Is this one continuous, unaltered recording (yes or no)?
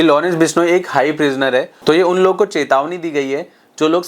no